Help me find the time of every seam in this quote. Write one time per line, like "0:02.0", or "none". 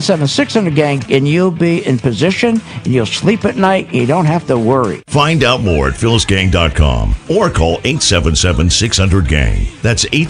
0:01.0